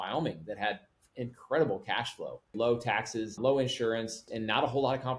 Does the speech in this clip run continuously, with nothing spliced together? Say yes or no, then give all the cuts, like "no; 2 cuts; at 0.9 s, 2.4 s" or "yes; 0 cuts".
no; 3 cuts; at 2.5 s, 3.4 s, 4.3 s